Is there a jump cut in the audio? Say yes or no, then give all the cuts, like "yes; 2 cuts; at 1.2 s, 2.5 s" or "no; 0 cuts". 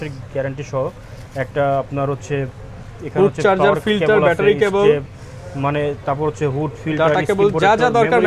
no; 0 cuts